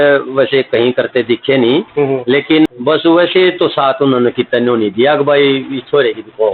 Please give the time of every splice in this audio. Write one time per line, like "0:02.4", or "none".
0:02.7